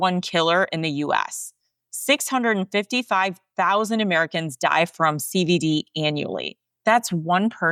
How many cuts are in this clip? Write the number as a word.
zero